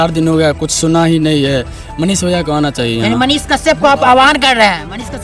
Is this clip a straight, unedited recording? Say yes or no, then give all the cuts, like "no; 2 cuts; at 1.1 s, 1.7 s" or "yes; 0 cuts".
yes; 0 cuts